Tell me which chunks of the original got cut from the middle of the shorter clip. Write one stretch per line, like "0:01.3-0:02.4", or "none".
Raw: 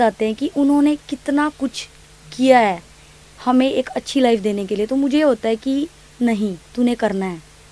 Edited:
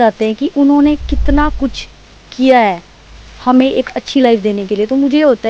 none